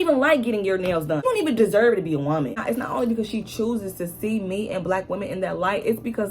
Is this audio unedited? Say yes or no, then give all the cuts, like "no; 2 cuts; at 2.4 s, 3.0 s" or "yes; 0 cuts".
no; 2 cuts; at 1.2 s, 2.6 s